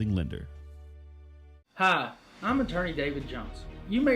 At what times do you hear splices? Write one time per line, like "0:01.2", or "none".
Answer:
0:01.6